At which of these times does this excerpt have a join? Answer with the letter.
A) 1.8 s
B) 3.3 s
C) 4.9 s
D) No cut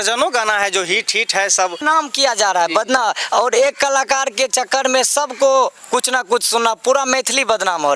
A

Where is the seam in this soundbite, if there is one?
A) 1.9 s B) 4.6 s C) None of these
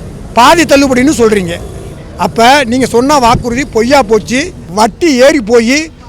B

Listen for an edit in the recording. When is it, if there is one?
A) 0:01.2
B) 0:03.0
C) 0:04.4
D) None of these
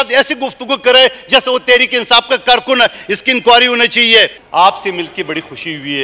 C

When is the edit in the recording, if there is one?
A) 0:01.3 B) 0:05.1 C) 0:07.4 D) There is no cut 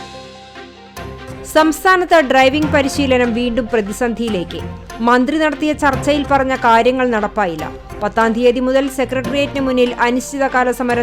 D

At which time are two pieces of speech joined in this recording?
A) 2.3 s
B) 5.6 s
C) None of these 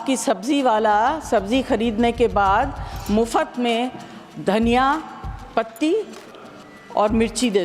C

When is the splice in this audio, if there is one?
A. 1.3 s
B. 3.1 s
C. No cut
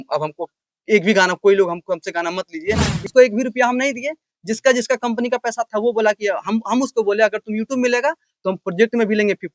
B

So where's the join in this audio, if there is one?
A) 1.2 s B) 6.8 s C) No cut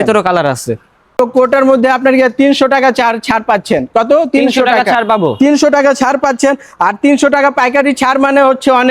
A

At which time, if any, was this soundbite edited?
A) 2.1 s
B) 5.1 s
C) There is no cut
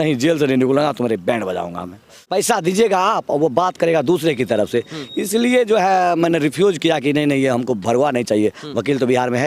A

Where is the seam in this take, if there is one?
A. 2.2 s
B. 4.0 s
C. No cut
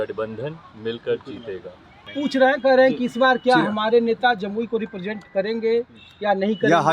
A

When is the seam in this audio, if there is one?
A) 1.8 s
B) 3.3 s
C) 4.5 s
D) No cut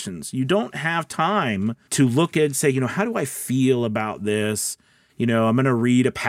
A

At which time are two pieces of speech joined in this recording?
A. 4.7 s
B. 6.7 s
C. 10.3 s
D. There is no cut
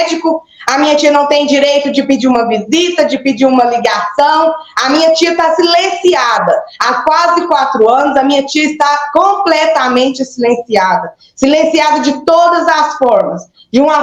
D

